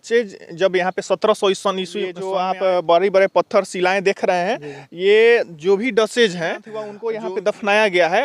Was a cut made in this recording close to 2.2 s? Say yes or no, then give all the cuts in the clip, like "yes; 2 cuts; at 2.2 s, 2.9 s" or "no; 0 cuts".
yes; 2 cuts; at 2.2 s, 6.9 s